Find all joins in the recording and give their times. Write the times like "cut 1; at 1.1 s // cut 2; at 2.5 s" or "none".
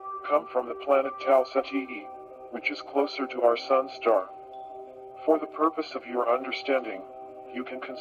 none